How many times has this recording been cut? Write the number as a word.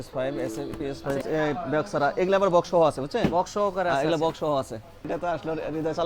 two